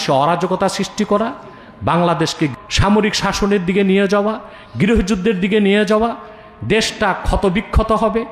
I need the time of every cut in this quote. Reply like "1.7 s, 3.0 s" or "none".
2.5 s

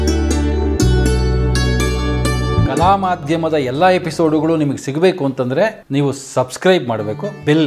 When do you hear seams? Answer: none

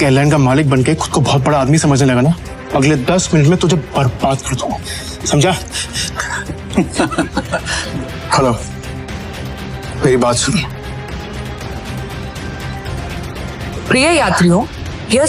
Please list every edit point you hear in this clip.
2.5 s, 7.8 s, 11.6 s

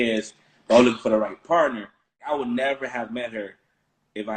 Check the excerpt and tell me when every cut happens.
2.2 s

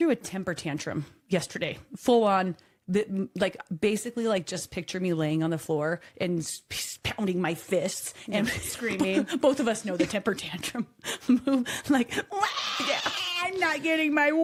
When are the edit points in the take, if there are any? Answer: none

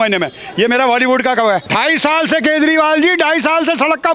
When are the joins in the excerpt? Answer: 1.7 s

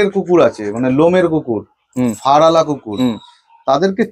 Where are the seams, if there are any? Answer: none

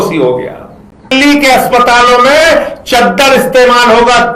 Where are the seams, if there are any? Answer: 1.1 s

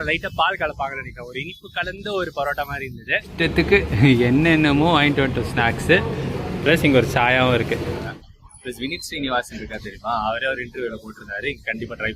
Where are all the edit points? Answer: 3.3 s, 8.1 s

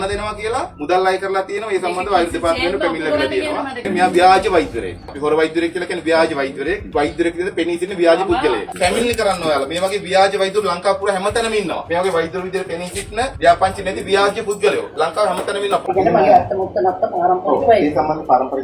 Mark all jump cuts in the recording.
3.8 s, 8.7 s, 15.8 s

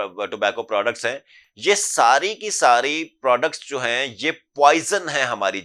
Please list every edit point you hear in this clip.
none

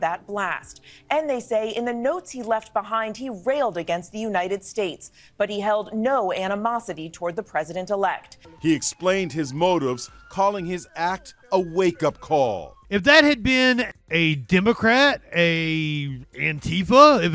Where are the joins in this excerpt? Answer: 8.3 s, 12.7 s, 13.9 s

